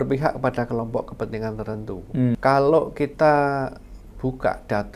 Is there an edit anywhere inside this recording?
yes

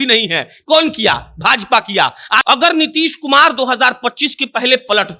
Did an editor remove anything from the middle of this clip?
yes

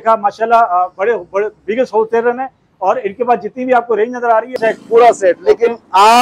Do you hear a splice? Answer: yes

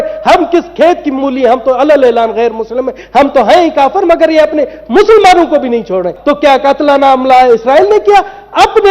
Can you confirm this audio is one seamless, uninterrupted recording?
no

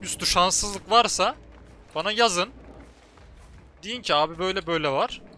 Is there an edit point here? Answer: no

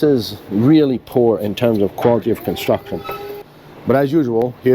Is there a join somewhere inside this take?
yes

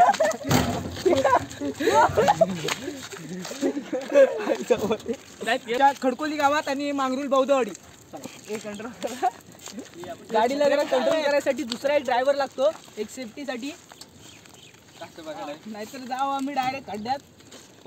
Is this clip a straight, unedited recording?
yes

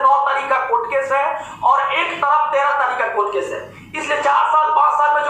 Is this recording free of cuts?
no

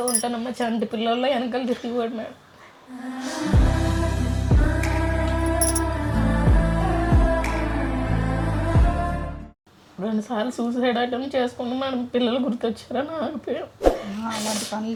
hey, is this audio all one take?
yes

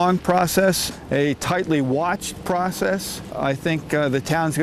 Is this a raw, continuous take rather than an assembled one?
no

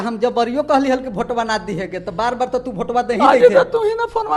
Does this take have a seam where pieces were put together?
no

